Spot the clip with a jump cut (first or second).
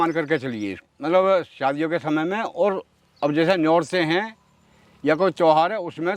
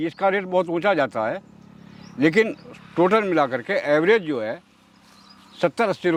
first